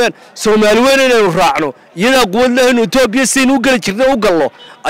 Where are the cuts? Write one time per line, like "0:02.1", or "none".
none